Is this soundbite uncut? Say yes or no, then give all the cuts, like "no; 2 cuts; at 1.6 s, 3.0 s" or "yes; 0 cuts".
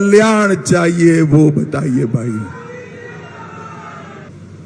yes; 0 cuts